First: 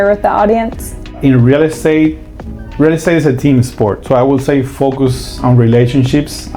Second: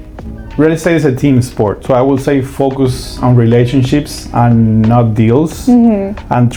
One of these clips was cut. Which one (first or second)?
first